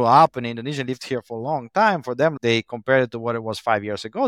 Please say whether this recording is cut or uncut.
cut